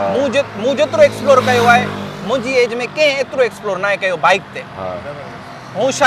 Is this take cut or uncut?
uncut